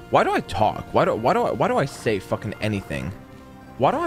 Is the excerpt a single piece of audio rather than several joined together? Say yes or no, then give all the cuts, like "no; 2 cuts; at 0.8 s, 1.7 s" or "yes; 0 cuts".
yes; 0 cuts